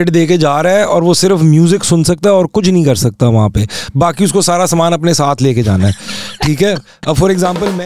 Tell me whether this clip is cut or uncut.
uncut